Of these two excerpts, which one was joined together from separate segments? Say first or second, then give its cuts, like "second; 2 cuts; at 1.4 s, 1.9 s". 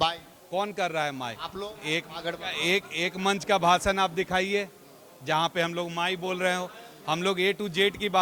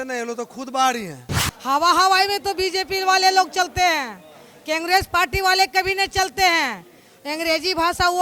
second; 1 cut; at 1.3 s